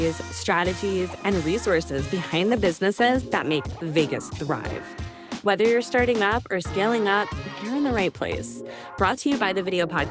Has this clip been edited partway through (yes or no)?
no